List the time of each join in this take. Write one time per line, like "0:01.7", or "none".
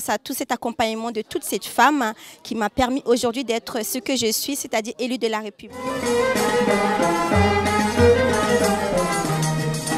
0:05.8